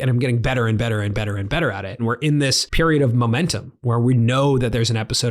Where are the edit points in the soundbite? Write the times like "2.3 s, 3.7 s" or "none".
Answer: 2.2 s